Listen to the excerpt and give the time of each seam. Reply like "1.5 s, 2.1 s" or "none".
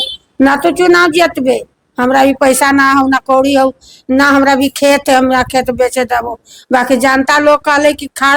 none